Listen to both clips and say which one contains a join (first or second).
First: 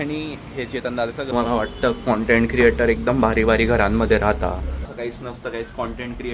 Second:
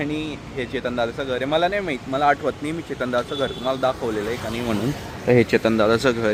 first